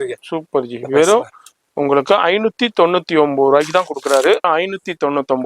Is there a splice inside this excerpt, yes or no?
yes